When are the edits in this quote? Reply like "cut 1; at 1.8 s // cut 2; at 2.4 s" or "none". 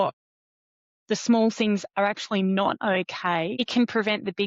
cut 1; at 3.5 s